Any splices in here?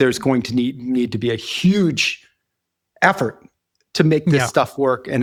no; 0 cuts

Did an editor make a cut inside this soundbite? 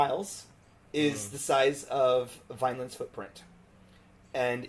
no; 0 cuts

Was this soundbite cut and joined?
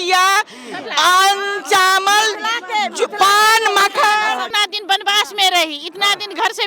yes; 1 cut; at 4.5 s

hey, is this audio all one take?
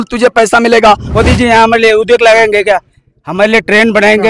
no; 1 cut; at 1.1 s

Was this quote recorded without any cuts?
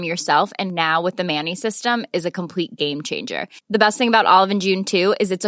yes; 0 cuts

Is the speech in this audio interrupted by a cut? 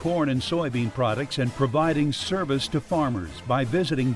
no; 0 cuts

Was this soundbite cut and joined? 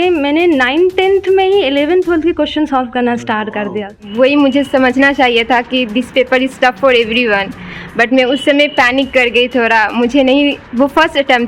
yes; 1 cut; at 4.0 s

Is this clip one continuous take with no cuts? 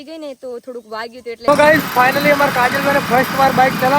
no; 1 cut; at 1.5 s

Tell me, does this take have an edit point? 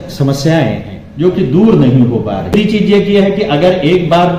yes; 1 cut; at 2.5 s

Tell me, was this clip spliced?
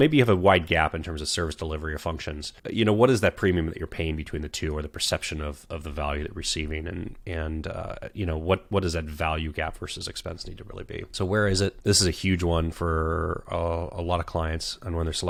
no; 0 cuts

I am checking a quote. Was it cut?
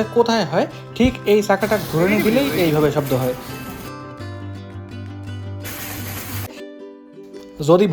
yes; 1 cut; at 6.5 s

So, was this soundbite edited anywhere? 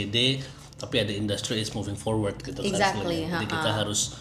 no; 0 cuts

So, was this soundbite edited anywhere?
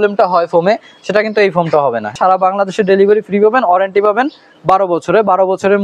yes; 1 cut; at 2.1 s

